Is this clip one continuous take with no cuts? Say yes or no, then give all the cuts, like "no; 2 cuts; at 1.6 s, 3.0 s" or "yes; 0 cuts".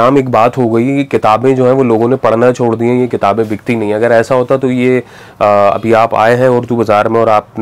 yes; 0 cuts